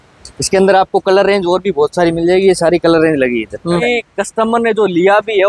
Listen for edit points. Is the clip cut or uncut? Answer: cut